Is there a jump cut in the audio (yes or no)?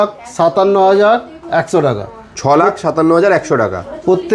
no